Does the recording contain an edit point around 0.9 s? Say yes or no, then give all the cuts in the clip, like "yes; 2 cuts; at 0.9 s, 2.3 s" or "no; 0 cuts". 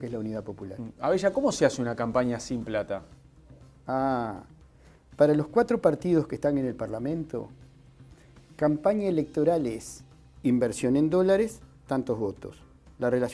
no; 0 cuts